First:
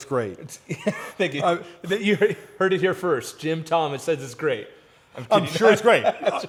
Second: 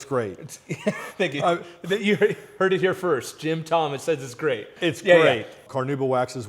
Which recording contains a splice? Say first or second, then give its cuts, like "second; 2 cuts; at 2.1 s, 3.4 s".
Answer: second; 2 cuts; at 4.7 s, 5.5 s